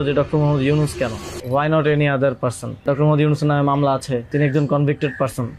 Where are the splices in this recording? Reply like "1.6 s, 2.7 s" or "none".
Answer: 1.3 s, 2.8 s, 4.3 s

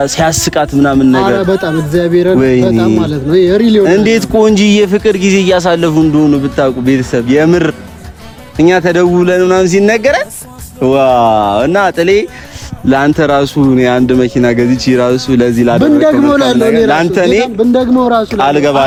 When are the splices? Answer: none

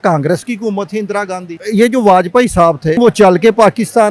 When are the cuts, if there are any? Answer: 1.6 s, 3.0 s

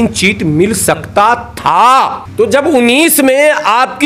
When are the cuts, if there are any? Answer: 2.2 s

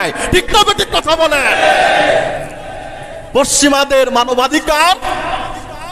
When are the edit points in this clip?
none

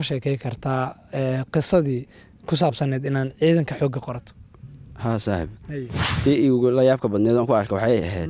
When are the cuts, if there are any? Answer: 6.2 s

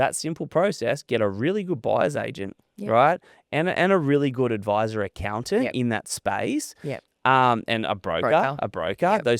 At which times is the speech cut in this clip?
none

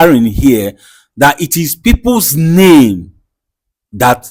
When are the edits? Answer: none

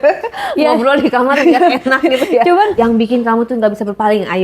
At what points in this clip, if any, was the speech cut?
2.7 s

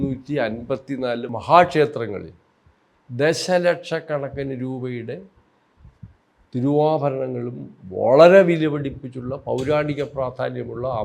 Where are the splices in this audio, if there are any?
1.3 s

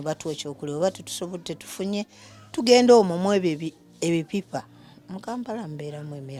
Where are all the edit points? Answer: none

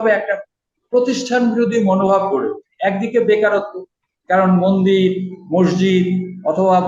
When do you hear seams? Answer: none

